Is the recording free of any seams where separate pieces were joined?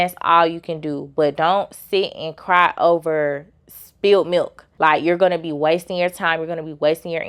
yes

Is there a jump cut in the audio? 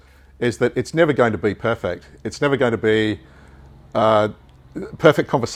no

